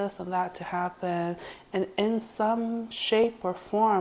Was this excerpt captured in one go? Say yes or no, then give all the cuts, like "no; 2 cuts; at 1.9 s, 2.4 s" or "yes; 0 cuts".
yes; 0 cuts